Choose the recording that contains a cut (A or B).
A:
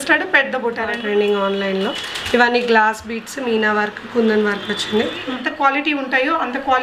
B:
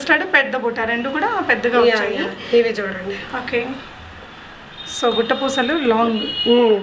A